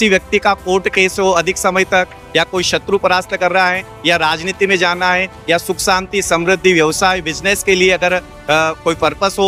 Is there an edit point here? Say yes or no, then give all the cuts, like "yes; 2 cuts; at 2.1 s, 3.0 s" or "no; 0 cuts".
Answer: no; 0 cuts